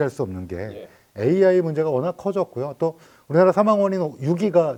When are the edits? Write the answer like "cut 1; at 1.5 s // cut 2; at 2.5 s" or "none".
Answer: none